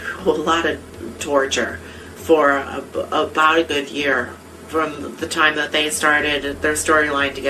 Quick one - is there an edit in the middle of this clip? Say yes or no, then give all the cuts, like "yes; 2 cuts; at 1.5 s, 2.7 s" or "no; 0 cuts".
no; 0 cuts